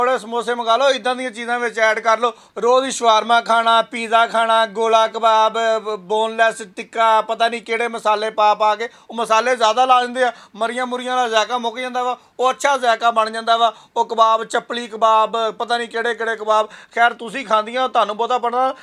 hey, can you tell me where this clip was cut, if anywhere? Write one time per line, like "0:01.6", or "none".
none